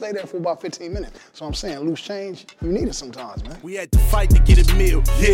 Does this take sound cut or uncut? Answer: cut